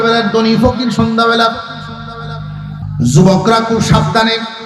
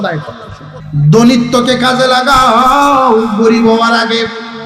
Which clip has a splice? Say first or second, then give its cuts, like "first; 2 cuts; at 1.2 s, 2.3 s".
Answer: first; 1 cut; at 2.8 s